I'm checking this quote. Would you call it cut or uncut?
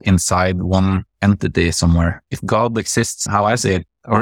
cut